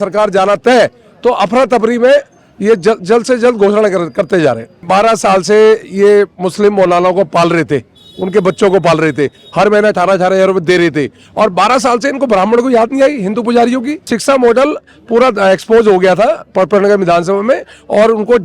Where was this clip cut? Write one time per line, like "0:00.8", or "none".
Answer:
0:04.9
0:14.1